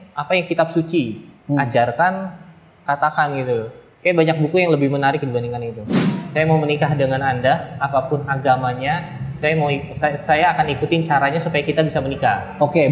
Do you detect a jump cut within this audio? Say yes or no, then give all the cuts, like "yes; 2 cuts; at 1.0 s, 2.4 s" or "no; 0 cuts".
yes; 1 cut; at 6.0 s